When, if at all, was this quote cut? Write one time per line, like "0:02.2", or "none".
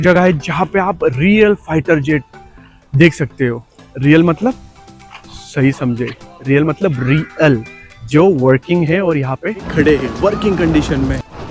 none